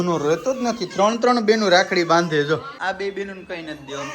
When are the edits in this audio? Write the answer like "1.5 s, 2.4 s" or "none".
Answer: 2.8 s